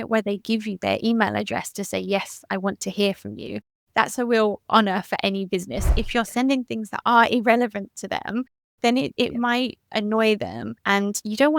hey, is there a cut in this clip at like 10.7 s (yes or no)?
yes